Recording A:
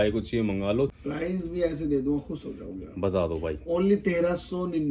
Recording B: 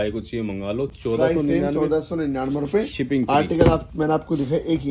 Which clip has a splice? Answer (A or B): A